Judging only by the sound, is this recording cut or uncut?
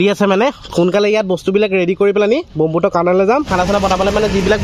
cut